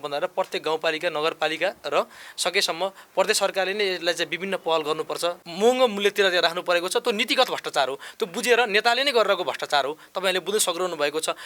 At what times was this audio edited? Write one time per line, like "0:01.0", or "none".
0:05.5